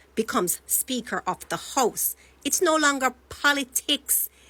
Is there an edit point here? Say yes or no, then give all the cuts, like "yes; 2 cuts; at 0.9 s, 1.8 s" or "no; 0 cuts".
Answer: no; 0 cuts